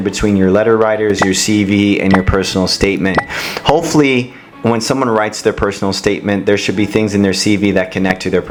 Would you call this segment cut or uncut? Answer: uncut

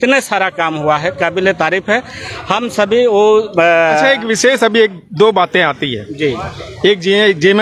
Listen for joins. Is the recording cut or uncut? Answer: uncut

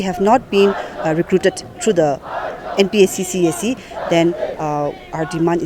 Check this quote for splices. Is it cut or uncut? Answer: uncut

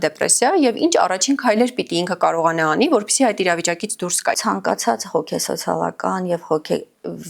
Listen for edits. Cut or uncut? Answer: cut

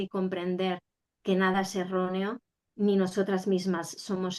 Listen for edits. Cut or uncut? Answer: uncut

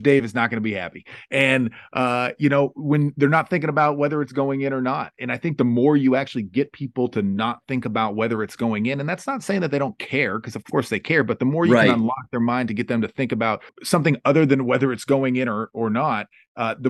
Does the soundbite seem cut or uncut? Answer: cut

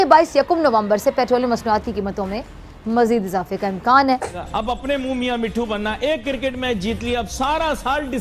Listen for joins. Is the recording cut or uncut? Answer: cut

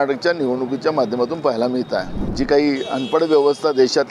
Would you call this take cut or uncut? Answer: cut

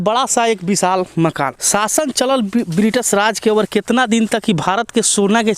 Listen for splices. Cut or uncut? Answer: cut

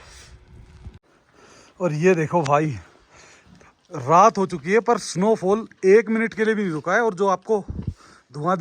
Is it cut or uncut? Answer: cut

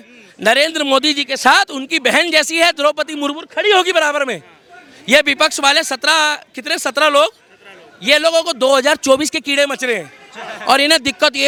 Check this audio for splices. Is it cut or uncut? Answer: uncut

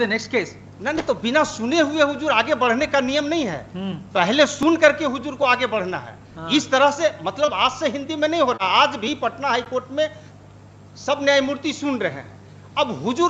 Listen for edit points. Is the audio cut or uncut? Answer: uncut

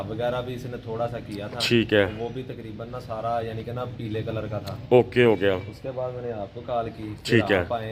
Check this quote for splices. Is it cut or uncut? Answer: uncut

